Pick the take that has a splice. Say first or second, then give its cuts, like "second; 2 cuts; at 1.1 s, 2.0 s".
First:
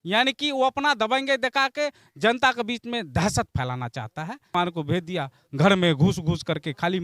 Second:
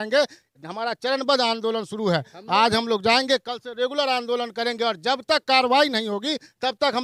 first; 1 cut; at 4.5 s